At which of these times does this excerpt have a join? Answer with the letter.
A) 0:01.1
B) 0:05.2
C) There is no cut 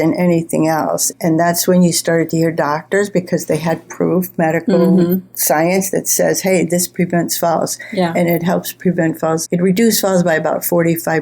A